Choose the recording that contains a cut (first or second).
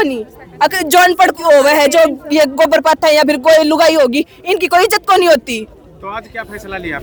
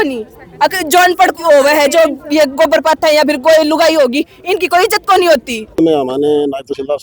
second